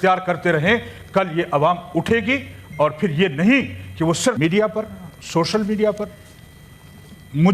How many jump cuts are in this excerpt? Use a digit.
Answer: 1